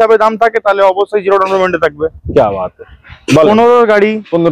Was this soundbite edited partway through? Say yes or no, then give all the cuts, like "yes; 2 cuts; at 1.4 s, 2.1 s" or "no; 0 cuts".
no; 0 cuts